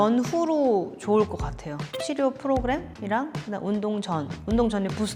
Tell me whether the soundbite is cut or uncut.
uncut